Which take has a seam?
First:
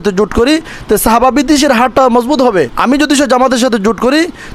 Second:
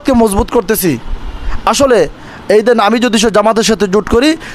first; 1 cut; at 2.7 s

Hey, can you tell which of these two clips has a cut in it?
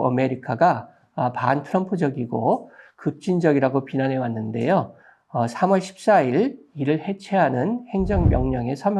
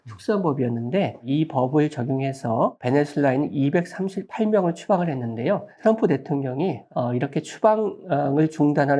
second; 5 cuts; at 1.2 s, 2.8 s, 4.2 s, 5.8 s, 6.8 s

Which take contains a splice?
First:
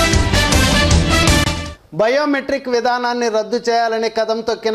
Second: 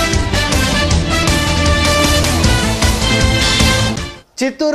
first; 1 cut; at 1.4 s

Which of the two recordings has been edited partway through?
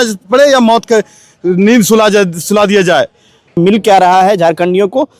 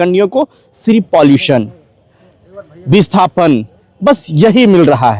first; 1 cut; at 3.6 s

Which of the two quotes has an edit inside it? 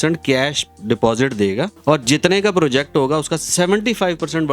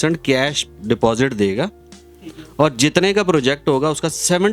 first; 1 cut; at 1.7 s

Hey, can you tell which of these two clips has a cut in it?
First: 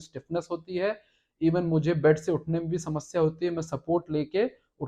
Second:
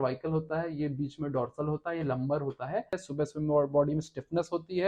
second; 1 cut; at 3.1 s

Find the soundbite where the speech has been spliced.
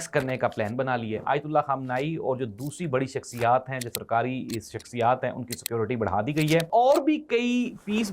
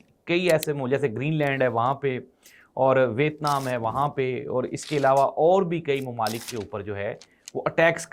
first; 2 cuts; at 1.1 s, 6.7 s

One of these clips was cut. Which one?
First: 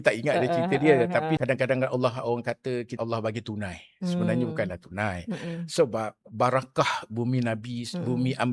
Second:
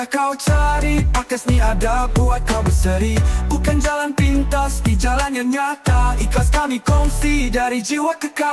first; 2 cuts; at 1.4 s, 2.9 s

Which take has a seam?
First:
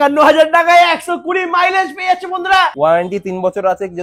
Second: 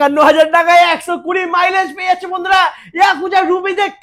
first; 1 cut; at 2.7 s

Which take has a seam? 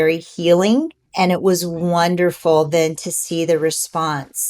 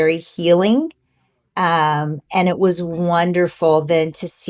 first; 1 cut; at 1.0 s

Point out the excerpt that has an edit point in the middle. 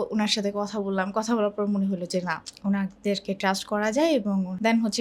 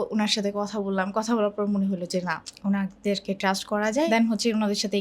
second; 1 cut; at 4.1 s

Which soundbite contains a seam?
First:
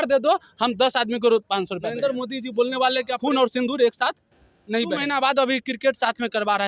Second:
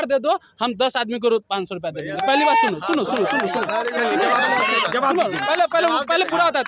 first; 3 cuts; at 1.9 s, 3.1 s, 5.0 s

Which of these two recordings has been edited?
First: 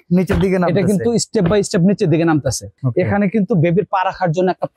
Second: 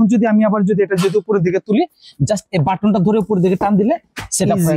first; 1 cut; at 2.7 s

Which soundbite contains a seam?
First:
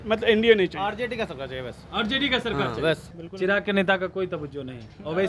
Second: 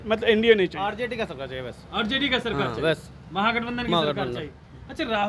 first; 1 cut; at 3.2 s

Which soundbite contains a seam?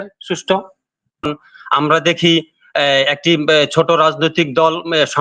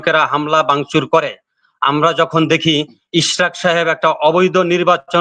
first; 1 cut; at 1.2 s

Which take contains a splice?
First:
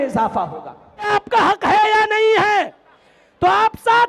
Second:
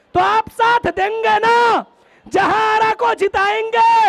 first; 1 cut; at 1.1 s

